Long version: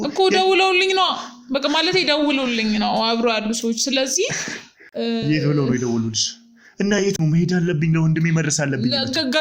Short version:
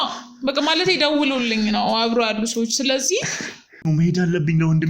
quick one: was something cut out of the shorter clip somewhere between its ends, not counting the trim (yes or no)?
yes